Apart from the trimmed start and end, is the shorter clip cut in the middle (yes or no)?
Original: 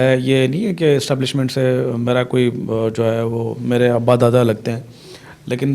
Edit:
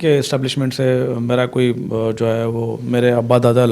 no